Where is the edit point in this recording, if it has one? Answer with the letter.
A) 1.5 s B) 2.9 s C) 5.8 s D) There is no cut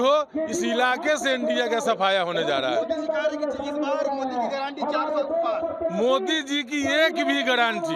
D